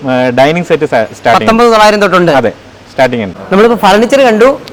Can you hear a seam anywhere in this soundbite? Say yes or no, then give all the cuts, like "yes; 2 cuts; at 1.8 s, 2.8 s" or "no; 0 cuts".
no; 0 cuts